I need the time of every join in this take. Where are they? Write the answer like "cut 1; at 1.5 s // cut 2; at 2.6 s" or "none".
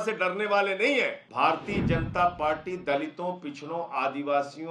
cut 1; at 1.2 s